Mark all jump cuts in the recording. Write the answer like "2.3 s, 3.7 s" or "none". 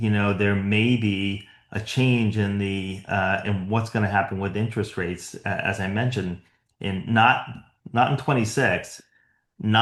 none